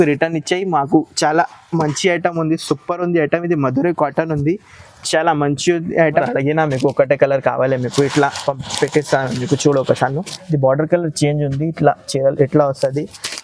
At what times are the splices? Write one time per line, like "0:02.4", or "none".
0:06.3